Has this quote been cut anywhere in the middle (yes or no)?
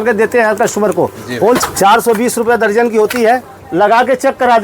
yes